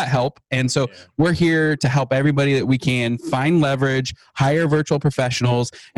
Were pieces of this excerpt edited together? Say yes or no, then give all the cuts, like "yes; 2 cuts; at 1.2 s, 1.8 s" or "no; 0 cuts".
no; 0 cuts